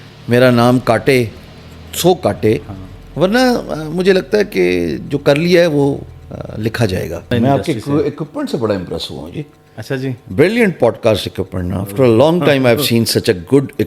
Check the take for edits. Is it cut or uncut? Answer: cut